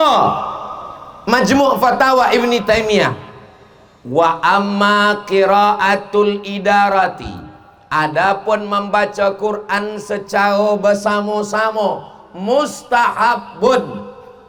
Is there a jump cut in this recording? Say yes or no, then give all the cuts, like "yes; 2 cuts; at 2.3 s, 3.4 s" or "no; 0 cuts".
no; 0 cuts